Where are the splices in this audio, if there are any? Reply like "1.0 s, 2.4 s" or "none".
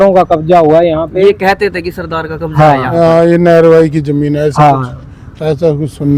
none